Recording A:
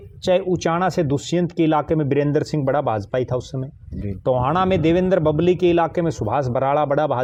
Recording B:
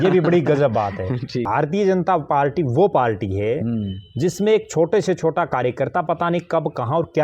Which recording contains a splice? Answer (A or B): B